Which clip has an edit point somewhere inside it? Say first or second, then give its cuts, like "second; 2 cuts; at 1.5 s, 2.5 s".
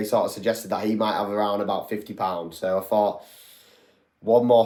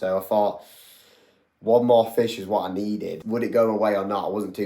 second; 1 cut; at 3.2 s